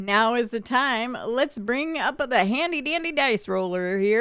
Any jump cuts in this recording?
no; 0 cuts

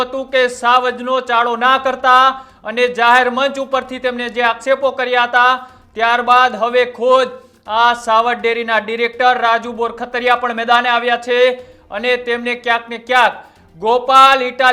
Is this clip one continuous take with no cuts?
yes; 0 cuts

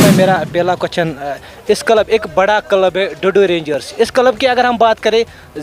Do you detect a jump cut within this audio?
no; 0 cuts

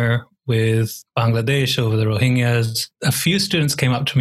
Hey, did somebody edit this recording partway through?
yes; 2 cuts; at 1.0 s, 2.9 s

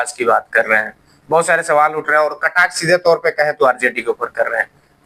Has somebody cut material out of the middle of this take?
no; 0 cuts

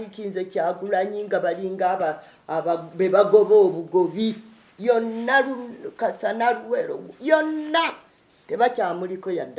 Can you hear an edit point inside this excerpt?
no; 0 cuts

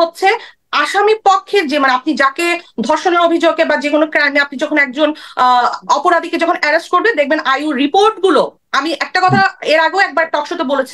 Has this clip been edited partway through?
no; 0 cuts

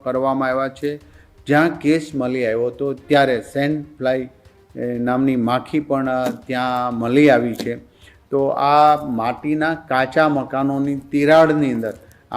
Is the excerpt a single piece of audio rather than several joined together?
yes; 0 cuts

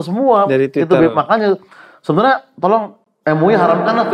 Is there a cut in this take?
no; 0 cuts

